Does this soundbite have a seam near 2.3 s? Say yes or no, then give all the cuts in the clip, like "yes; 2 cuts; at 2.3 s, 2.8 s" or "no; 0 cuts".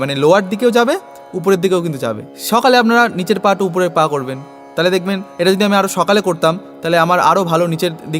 yes; 1 cut; at 2.3 s